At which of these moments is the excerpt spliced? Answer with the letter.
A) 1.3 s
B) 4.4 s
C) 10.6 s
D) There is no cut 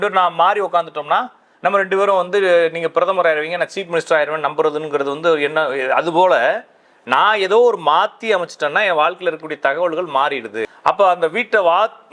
C